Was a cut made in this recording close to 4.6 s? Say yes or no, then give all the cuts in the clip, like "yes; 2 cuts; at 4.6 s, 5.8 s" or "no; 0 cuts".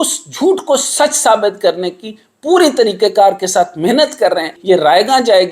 yes; 1 cut; at 4.6 s